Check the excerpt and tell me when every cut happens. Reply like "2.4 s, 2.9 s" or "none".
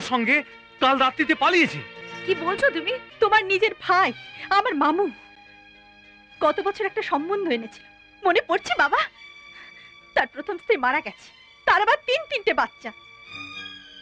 3.1 s